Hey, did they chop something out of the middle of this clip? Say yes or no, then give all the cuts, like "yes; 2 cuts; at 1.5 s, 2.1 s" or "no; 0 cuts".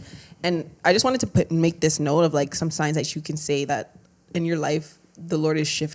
no; 0 cuts